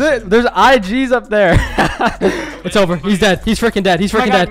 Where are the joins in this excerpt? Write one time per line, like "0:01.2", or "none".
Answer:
0:02.5